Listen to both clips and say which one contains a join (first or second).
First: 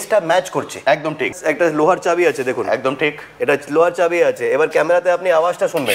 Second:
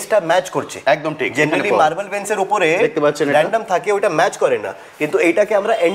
first